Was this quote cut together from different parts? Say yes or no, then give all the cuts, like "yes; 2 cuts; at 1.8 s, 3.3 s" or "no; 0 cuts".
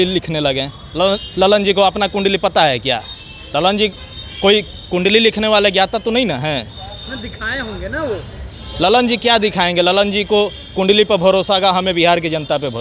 no; 0 cuts